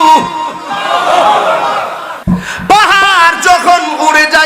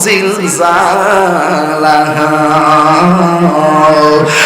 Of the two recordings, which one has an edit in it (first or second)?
first